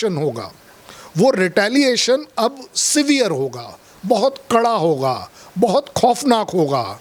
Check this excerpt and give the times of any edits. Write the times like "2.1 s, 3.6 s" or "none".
none

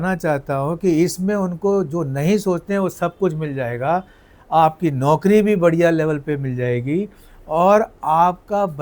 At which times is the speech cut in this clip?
none

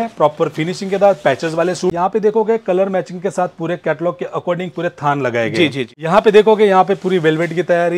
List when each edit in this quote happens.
1.9 s, 6.0 s

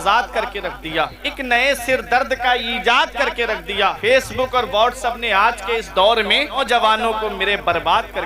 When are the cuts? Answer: 1.2 s, 4.0 s, 6.6 s

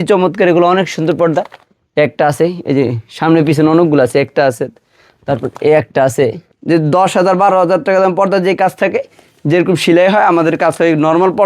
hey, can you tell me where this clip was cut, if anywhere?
6.5 s

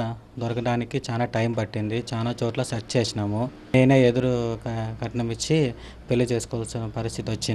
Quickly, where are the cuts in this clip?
3.7 s

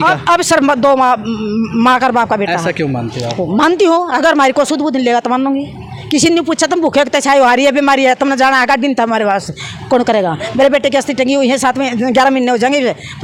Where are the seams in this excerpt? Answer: none

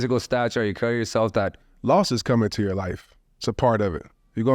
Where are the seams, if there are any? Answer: 1.6 s

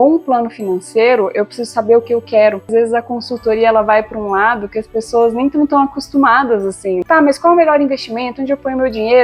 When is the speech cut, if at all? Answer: 2.7 s, 7.0 s

